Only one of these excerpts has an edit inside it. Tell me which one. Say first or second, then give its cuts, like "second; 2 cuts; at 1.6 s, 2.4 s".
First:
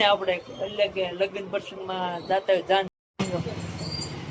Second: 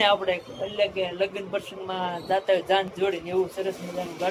first; 1 cut; at 2.9 s